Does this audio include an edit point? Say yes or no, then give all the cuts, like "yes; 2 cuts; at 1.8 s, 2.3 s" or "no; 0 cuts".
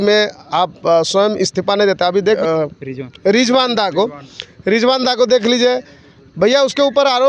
no; 0 cuts